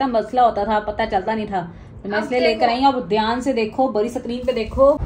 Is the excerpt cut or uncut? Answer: uncut